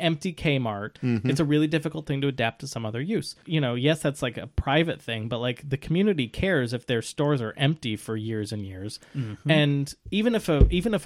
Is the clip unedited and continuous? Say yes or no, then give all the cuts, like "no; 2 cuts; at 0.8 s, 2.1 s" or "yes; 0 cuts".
no; 2 cuts; at 0.9 s, 3.4 s